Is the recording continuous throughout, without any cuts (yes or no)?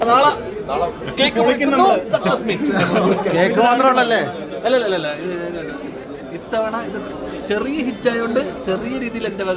yes